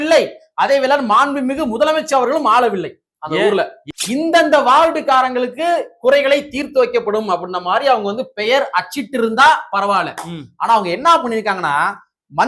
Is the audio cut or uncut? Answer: cut